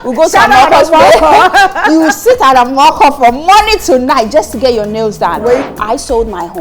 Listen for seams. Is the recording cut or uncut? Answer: cut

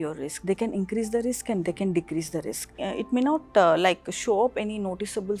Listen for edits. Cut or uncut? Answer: cut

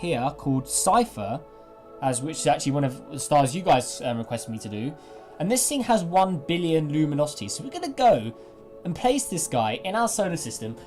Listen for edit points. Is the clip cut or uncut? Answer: cut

